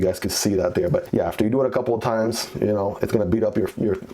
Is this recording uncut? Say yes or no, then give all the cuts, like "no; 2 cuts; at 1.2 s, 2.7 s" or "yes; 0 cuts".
no; 1 cut; at 1.1 s